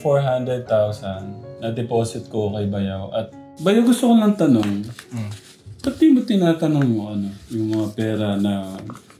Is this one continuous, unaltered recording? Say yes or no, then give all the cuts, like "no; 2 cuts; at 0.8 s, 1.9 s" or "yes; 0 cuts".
no; 1 cut; at 3.4 s